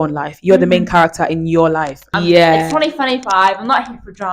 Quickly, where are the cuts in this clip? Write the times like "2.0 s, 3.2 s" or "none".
2.1 s